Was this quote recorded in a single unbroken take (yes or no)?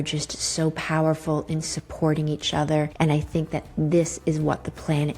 no